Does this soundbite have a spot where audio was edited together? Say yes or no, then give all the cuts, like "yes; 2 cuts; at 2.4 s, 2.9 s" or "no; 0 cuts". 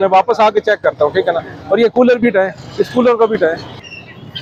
no; 0 cuts